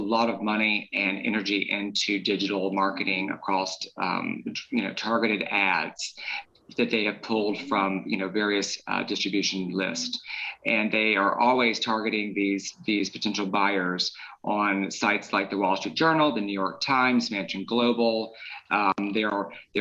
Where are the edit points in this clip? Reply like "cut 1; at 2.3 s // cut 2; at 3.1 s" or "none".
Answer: none